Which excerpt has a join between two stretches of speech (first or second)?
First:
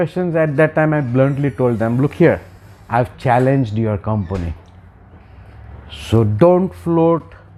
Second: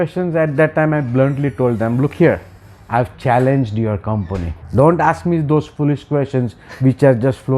second